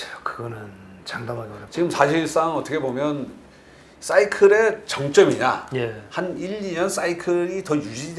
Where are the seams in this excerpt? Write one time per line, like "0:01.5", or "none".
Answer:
0:01.5